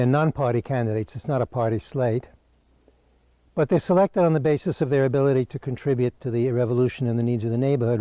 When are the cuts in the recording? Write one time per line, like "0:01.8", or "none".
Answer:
0:04.9

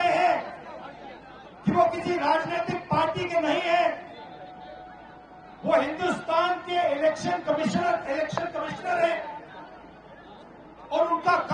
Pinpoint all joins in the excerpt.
none

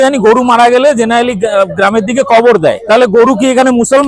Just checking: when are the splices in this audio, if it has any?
0:02.8

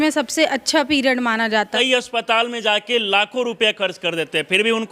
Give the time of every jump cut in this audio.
0:01.7

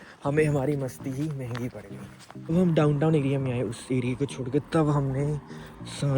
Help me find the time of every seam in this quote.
0:02.5

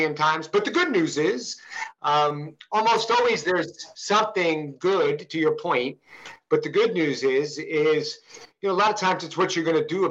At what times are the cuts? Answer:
none

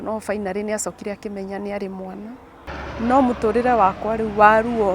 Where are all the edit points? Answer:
0:02.6

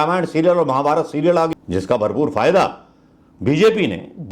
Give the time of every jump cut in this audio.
0:01.5

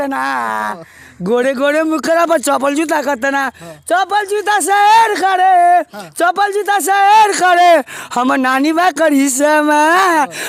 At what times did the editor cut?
none

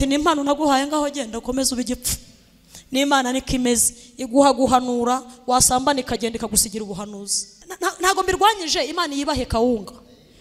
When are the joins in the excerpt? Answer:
0:07.8

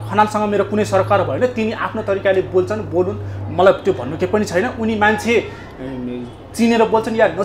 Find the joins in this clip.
none

